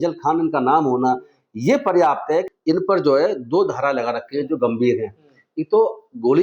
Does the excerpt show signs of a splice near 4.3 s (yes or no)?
no